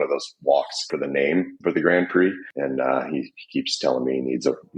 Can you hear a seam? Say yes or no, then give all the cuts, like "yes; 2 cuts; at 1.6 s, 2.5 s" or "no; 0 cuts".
yes; 2 cuts; at 0.9 s, 2.5 s